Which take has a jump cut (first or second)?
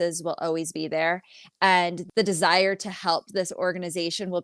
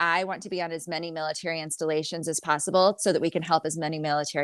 first